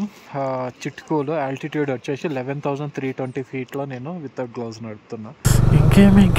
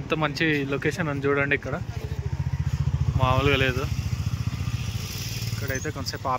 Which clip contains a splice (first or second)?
first